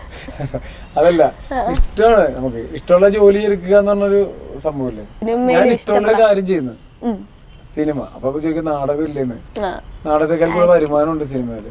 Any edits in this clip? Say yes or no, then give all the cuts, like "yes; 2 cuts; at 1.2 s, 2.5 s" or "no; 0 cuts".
yes; 1 cut; at 5.1 s